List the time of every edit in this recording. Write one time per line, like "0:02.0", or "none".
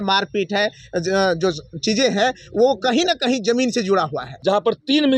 0:04.3

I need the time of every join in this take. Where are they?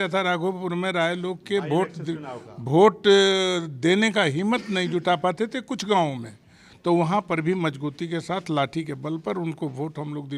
none

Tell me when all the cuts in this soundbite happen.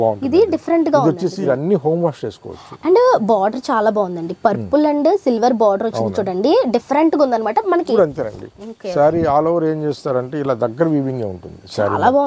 0:01.5
0:07.9

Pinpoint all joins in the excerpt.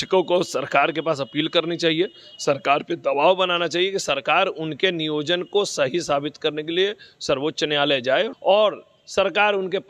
0:08.3

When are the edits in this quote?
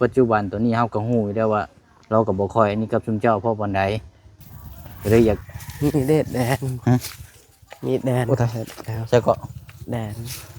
0:05.5

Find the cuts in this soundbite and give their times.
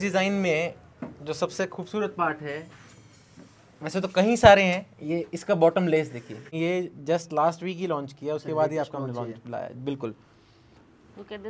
0:06.4

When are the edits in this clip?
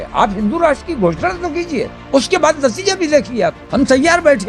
0:02.0
0:03.6

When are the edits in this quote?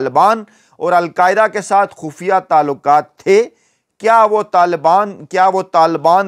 none

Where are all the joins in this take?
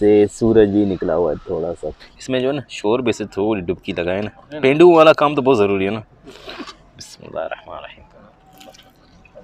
0:02.0

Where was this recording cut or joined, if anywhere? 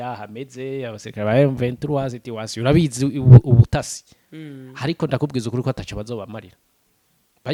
none

